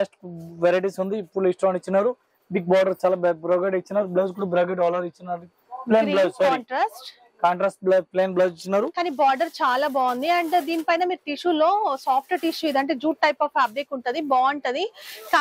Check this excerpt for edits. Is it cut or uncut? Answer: uncut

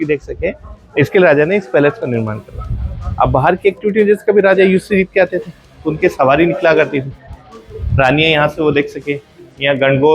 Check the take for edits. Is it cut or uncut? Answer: uncut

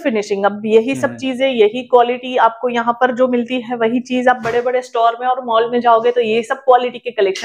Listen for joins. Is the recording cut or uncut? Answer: uncut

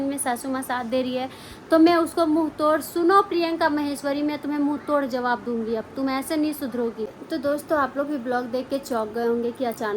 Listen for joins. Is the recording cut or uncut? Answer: cut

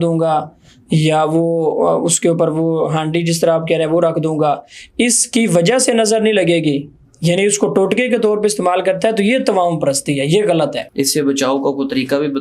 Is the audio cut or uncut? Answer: cut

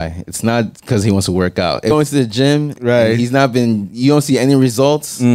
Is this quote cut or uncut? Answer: cut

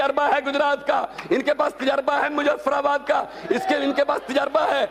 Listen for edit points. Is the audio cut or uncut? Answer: uncut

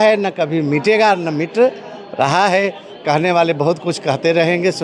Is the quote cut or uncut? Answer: uncut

